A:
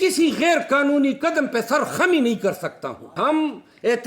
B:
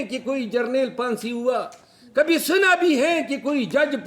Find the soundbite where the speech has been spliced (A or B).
A